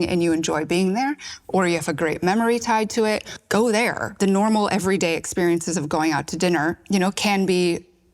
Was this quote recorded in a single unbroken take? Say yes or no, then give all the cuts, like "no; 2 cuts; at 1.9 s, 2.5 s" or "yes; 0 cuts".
no; 3 cuts; at 3.3 s, 4.1 s, 6.8 s